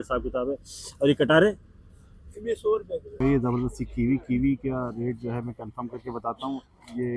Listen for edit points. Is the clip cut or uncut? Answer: cut